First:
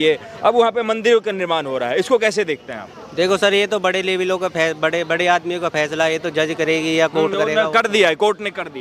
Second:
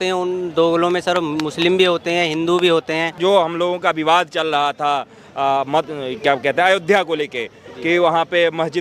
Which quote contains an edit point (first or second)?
second